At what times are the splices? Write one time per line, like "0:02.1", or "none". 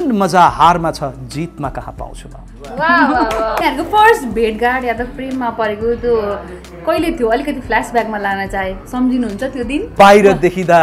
0:03.6
0:09.9